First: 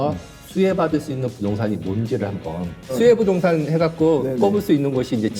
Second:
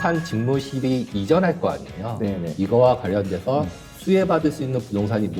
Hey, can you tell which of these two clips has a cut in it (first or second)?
first